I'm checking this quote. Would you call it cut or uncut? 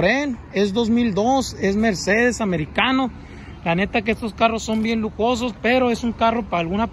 uncut